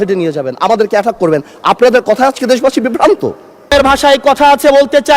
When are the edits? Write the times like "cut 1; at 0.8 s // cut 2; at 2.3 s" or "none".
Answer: cut 1; at 3.7 s